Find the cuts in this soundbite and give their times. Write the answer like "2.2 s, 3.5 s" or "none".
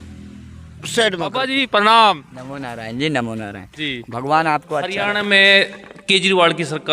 1.5 s, 4.8 s